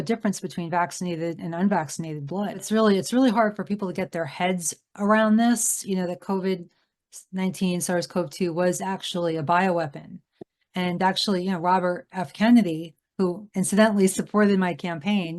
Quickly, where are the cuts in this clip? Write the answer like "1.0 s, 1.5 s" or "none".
2.6 s